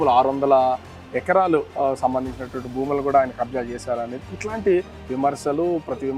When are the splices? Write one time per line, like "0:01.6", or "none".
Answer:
none